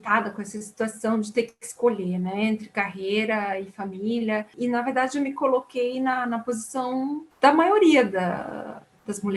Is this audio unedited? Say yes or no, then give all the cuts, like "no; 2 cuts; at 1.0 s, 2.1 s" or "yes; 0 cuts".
no; 2 cuts; at 4.5 s, 7.2 s